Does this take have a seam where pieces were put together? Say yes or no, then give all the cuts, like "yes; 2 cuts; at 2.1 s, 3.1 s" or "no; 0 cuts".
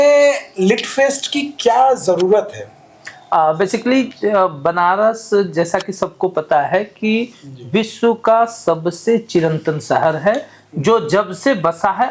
no; 0 cuts